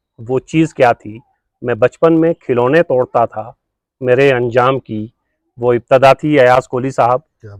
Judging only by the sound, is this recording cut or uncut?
uncut